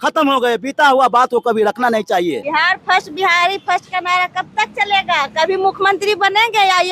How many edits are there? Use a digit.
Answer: 1